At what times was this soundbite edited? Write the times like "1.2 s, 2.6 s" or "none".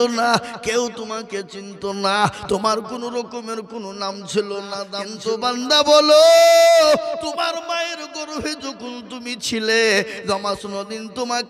5.0 s